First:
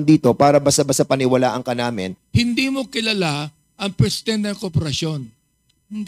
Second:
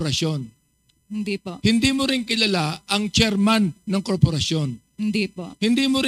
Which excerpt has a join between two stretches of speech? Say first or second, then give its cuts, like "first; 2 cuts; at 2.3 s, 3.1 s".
first; 1 cut; at 2.2 s